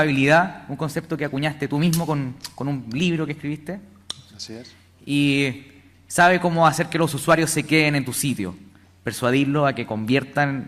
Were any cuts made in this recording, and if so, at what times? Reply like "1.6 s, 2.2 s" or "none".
9.5 s

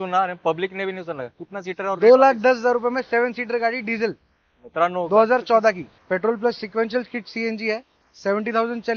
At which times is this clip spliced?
5.9 s

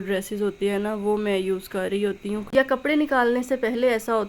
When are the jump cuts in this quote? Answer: 2.4 s

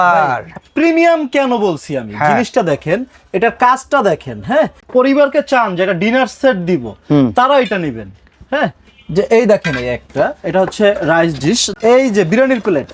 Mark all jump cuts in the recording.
4.8 s, 11.7 s

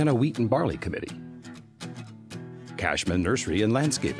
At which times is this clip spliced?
1.1 s, 2.8 s

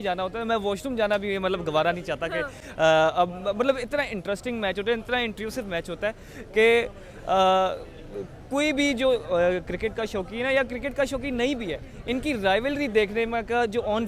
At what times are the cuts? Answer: none

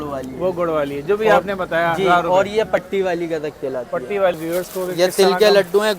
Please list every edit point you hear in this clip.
4.4 s

